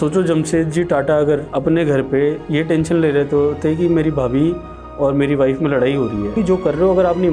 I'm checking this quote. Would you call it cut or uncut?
cut